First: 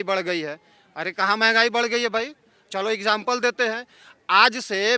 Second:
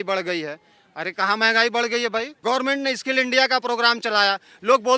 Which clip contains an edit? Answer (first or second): second